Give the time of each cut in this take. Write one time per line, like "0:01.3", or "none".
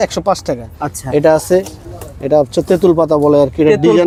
none